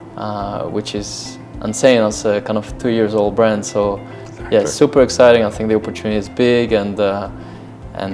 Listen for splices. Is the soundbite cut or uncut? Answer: uncut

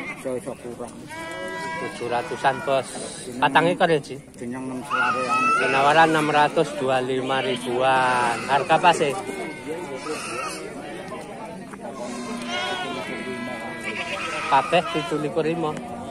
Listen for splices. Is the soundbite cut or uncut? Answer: uncut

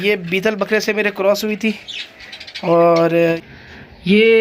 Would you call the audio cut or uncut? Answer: cut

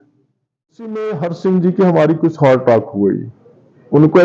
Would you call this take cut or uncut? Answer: cut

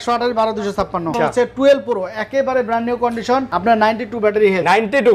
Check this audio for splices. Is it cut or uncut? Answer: cut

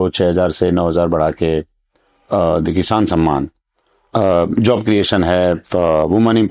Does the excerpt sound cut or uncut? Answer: uncut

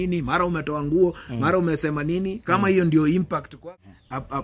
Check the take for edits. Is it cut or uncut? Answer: cut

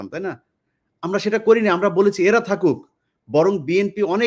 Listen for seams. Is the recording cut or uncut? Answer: uncut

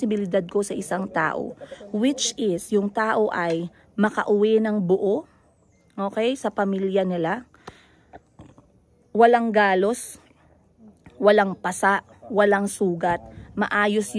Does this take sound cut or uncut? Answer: uncut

